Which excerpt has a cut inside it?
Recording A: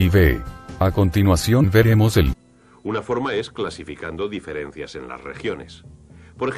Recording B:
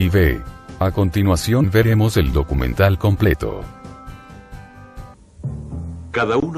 B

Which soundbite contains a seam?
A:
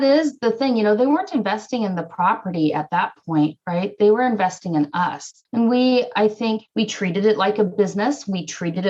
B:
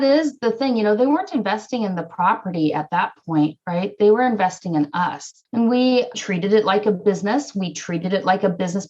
B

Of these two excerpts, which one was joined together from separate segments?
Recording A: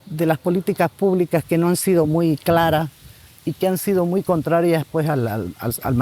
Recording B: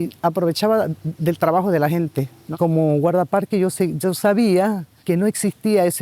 B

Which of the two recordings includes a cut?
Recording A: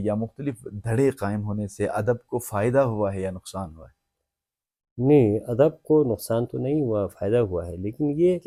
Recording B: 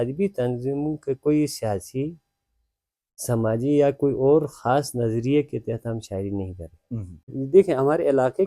B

